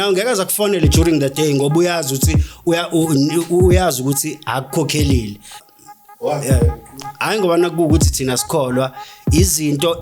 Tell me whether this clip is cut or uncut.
cut